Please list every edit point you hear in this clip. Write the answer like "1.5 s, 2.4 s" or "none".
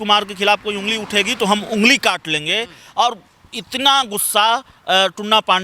none